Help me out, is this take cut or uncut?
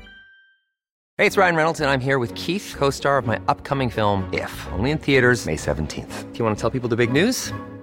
cut